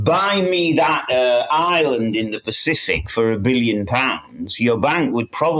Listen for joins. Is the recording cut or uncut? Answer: uncut